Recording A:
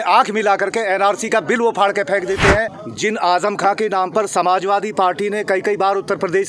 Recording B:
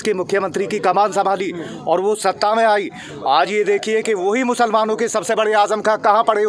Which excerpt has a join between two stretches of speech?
A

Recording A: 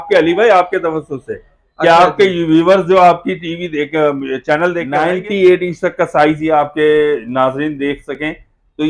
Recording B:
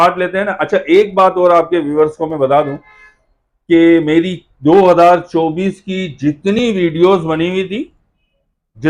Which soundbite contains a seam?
A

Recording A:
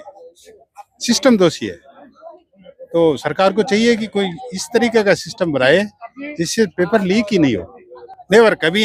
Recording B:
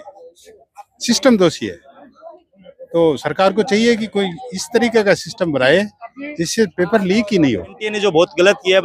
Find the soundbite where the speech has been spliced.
B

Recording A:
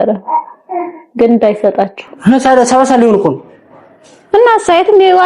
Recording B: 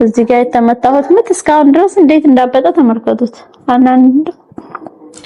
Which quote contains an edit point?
A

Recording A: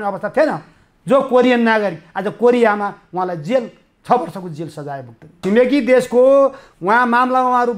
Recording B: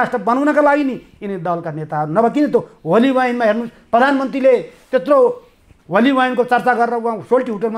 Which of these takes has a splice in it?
A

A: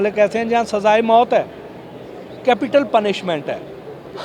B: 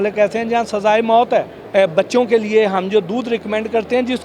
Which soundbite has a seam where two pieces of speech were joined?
B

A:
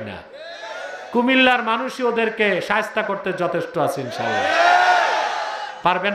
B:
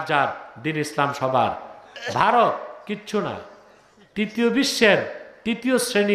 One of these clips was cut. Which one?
B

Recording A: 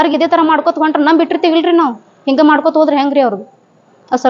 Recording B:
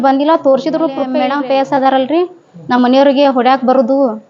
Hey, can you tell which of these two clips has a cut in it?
B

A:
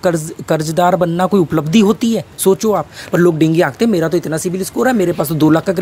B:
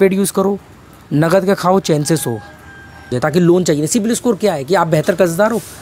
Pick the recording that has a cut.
B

